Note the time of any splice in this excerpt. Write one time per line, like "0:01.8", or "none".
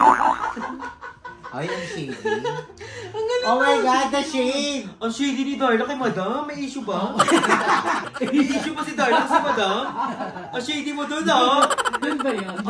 0:08.1